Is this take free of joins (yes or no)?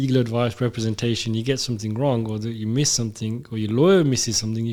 yes